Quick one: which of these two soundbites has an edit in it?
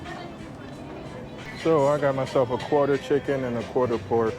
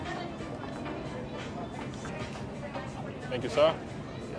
first; 1 cut; at 1.5 s

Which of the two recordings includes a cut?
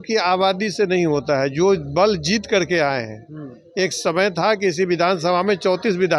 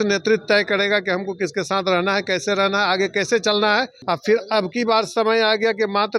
second; 1 cut; at 4.0 s

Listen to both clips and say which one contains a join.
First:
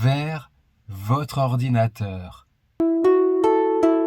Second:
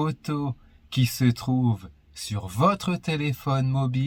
first; 1 cut; at 2.8 s

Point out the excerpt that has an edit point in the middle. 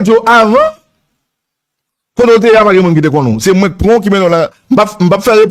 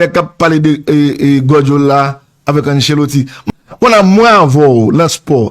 second; 1 cut; at 3.4 s

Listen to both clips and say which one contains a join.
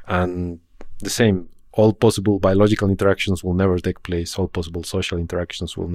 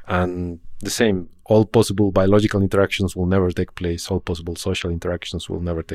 second; 1 cut; at 1.1 s

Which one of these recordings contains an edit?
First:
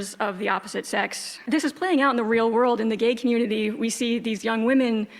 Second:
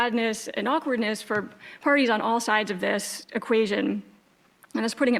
first; 1 cut; at 1.3 s

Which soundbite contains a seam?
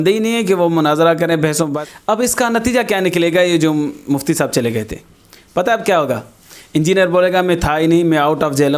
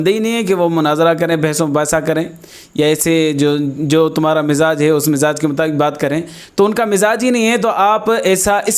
first; 1 cut; at 1.8 s

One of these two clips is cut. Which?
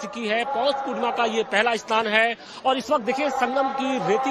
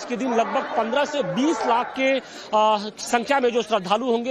second; 1 cut; at 1.7 s

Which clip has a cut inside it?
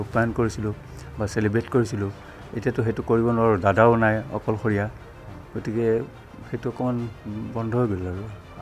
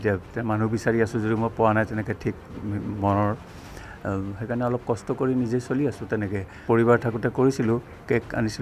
second; 1 cut; at 6.5 s

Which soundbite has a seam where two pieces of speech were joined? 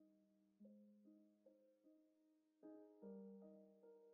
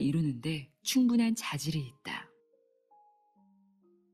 second; 1 cut; at 2.3 s

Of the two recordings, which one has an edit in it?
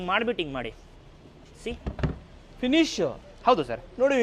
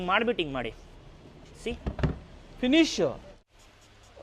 second; 1 cut; at 3.3 s

